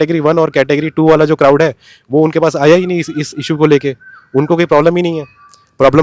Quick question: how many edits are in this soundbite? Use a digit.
0